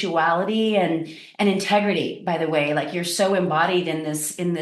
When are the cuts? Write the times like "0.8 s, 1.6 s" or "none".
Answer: none